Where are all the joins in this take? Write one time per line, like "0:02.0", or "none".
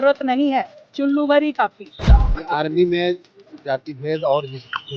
0:02.0